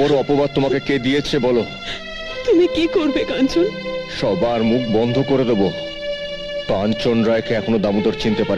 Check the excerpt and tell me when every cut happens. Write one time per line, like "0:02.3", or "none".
none